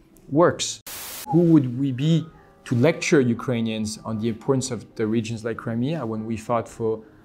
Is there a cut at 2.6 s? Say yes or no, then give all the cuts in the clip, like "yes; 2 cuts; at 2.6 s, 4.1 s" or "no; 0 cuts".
no; 1 cut; at 1.2 s